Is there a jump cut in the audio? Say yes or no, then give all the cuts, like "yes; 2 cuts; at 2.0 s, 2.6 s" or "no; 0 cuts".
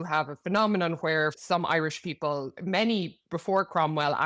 yes; 2 cuts; at 1.4 s, 2.5 s